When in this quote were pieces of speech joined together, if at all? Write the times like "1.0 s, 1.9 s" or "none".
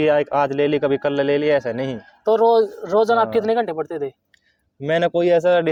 none